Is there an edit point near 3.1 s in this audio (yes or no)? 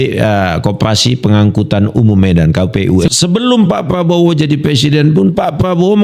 yes